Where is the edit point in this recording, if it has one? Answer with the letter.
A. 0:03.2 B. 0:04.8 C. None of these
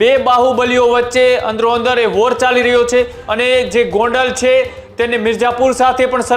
A